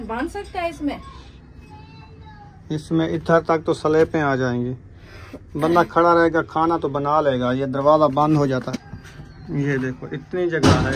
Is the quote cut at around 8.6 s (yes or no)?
yes